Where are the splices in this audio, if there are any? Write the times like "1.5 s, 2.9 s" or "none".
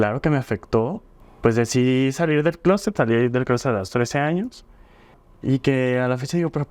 1.1 s, 5.2 s